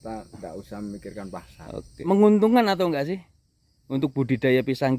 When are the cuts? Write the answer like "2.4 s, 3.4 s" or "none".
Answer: 2.0 s